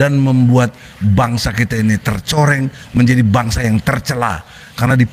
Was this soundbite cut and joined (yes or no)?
no